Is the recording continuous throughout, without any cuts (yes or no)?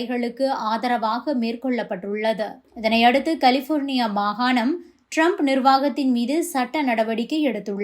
no